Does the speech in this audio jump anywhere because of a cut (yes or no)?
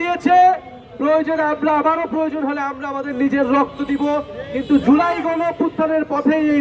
no